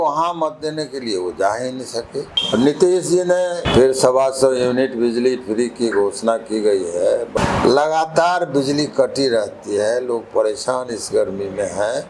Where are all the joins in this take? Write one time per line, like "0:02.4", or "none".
0:02.4
0:03.6
0:07.3